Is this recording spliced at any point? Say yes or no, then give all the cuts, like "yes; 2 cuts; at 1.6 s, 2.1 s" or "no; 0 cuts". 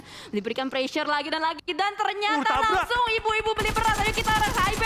no; 0 cuts